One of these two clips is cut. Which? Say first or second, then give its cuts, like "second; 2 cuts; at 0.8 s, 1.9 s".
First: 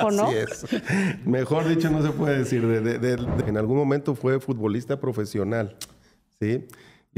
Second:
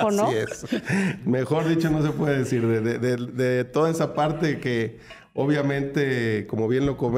first; 1 cut; at 3.4 s